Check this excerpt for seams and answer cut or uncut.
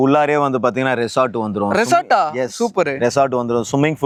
uncut